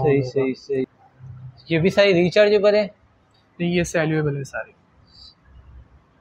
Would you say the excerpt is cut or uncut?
cut